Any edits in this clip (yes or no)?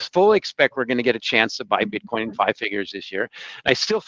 no